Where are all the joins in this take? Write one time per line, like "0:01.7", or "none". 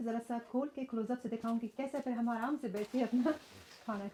none